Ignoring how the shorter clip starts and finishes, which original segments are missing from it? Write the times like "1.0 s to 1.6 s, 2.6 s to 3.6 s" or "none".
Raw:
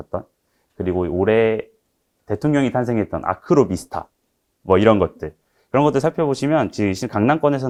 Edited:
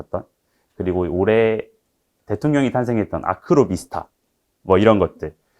none

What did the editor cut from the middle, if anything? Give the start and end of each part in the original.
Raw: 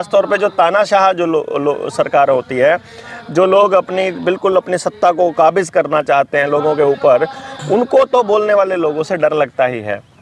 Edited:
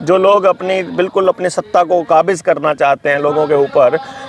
none

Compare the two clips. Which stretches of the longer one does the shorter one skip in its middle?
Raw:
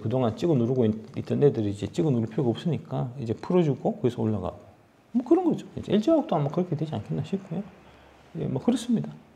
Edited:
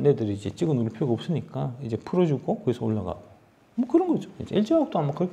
none

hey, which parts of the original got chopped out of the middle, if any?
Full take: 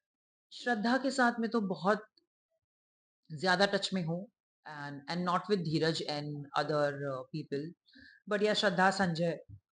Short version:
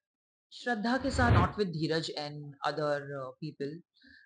1.3 s to 5.3 s

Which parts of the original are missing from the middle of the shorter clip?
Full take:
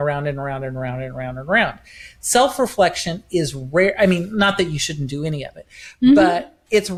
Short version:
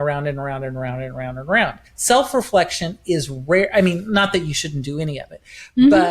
1.9 s to 2.1 s

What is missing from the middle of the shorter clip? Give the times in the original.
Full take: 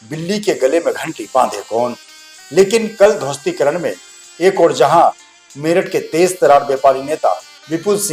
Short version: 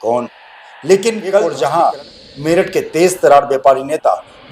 3.2 s to 4.7 s

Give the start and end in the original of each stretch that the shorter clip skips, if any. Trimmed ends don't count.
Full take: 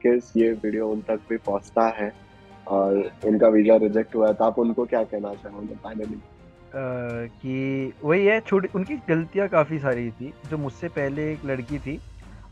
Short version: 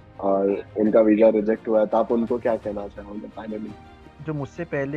6.5 s to 10.3 s

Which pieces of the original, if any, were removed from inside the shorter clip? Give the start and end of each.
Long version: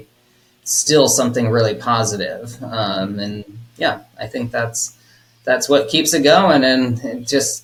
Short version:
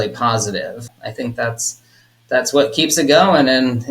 2.6 s to 4.1 s

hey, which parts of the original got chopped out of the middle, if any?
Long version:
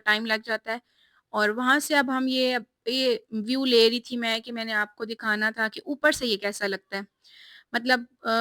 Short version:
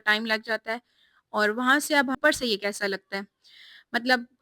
2.2 s to 6.0 s

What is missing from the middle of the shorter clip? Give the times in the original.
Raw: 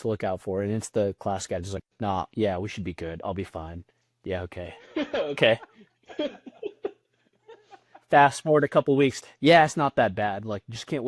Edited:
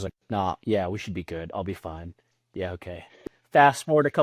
5.0 s to 7.8 s

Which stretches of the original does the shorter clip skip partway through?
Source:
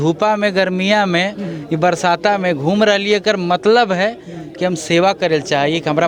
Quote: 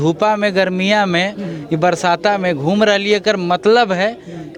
none

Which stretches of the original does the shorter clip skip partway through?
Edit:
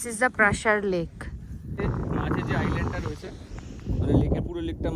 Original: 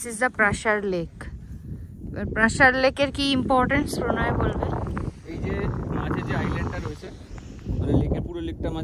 1.8 s to 5.6 s

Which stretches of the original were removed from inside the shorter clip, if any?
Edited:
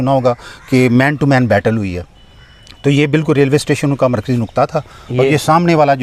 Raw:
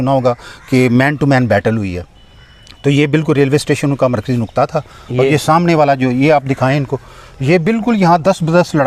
none

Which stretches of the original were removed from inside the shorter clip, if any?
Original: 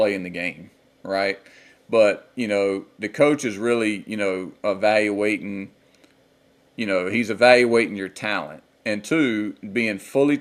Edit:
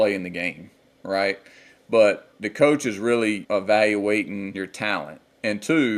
2.3 s to 2.9 s, 4.0 s to 4.6 s, 5.8 s to 8.1 s

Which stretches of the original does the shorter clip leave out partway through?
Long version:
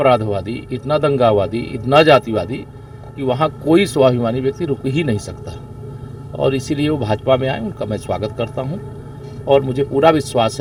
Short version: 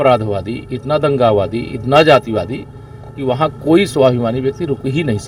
none

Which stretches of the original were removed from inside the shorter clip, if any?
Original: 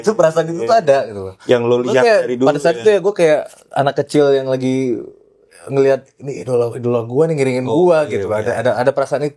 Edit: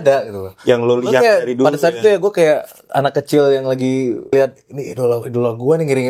5.1 s to 5.8 s

